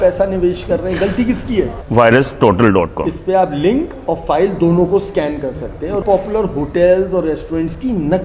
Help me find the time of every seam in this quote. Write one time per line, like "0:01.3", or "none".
0:01.8
0:06.0